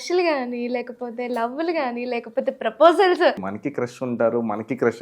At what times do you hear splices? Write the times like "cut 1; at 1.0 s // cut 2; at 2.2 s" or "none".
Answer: cut 1; at 3.5 s